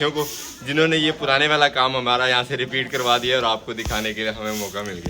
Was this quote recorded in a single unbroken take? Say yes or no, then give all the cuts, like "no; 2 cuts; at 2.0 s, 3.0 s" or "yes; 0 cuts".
yes; 0 cuts